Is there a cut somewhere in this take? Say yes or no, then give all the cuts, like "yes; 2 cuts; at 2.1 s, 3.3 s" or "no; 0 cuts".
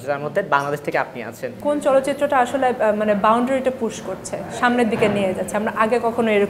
yes; 1 cut; at 1.6 s